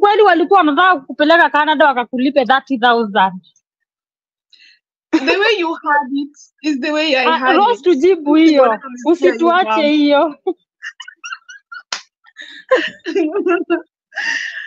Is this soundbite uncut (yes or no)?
yes